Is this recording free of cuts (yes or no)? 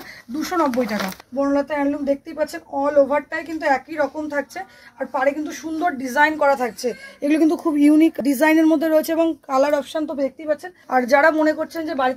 no